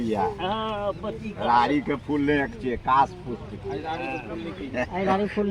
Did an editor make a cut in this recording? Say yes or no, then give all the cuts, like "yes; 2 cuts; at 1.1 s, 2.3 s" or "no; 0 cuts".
no; 0 cuts